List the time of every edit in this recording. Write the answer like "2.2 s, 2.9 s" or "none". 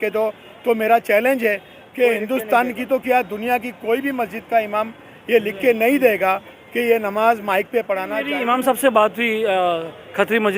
8.2 s